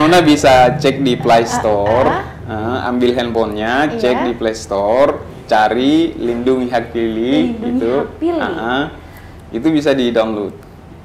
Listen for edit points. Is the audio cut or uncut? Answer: uncut